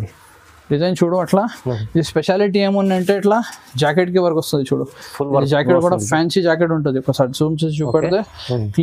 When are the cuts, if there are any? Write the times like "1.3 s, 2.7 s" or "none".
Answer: none